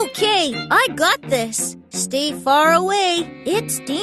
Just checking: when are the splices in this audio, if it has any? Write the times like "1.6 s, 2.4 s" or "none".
none

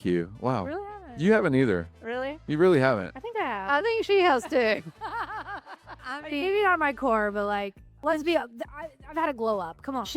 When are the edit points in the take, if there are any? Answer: 6.0 s, 8.0 s

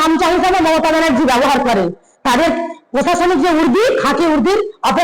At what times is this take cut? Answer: none

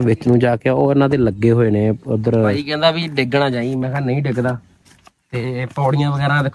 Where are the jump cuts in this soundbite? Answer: 2.6 s

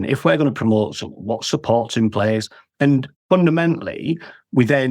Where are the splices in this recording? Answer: 2.6 s

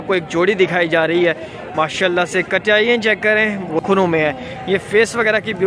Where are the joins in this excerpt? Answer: 3.8 s

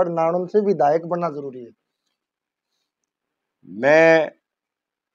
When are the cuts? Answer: none

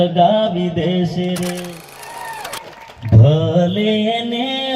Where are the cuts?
1.9 s

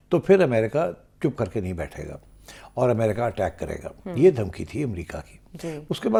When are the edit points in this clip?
none

